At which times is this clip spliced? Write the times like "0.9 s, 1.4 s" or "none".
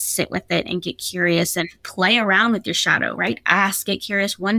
1.9 s